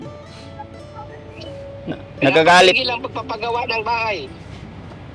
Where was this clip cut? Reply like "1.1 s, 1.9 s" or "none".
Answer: none